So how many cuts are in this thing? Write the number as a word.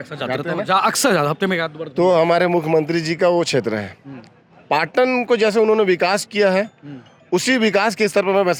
zero